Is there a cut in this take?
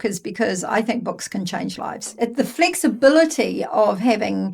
yes; 1 cut; at 2.0 s

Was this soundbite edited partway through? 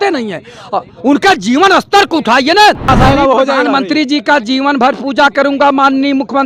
yes; 1 cut; at 2.9 s

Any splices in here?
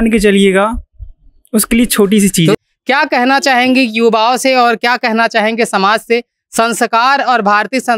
yes; 1 cut; at 2.6 s

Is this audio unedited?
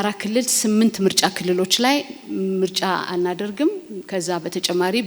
yes; 0 cuts

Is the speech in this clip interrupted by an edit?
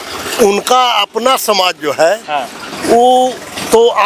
no; 0 cuts

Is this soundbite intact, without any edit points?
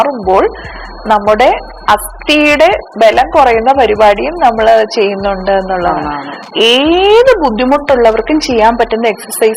no; 1 cut; at 6.5 s

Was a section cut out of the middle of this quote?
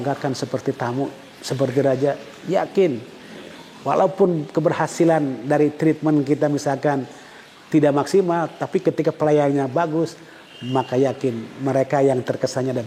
no; 0 cuts

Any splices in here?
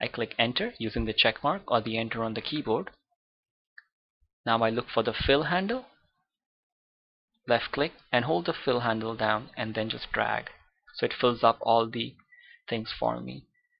yes; 1 cut; at 1.2 s

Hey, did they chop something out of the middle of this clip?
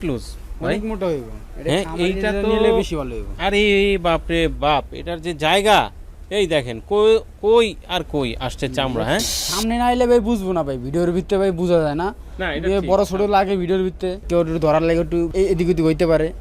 yes; 3 cuts; at 9.4 s, 14.2 s, 15.3 s

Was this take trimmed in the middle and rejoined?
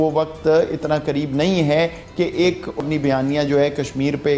yes; 1 cut; at 2.8 s

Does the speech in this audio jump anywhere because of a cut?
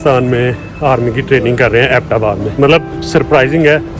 yes; 1 cut; at 2.5 s

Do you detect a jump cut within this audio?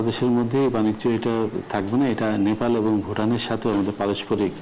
no; 0 cuts

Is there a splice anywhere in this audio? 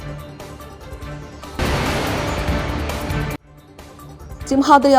yes; 1 cut; at 1.2 s

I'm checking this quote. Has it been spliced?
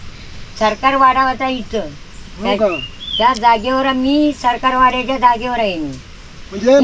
no; 0 cuts

